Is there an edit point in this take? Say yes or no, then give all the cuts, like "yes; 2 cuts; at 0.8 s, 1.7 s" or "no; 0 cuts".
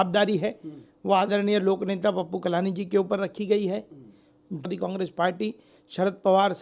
yes; 1 cut; at 4.7 s